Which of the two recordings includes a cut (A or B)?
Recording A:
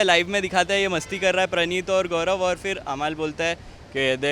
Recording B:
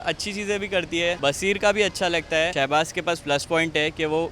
B